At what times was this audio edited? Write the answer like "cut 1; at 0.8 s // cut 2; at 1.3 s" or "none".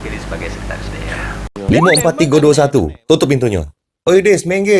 cut 1; at 1.5 s